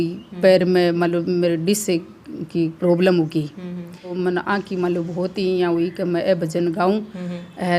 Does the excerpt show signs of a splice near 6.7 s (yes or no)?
no